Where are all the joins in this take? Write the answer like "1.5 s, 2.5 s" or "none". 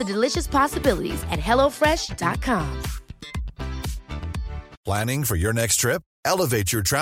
4.7 s